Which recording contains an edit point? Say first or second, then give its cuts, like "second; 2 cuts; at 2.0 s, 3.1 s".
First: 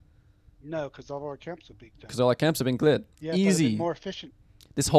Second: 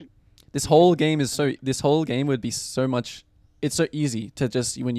first; 1 cut; at 3.1 s